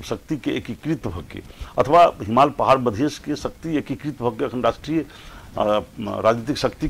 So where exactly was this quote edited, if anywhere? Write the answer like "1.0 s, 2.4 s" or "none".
none